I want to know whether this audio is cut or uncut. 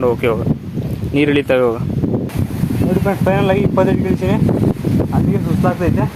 cut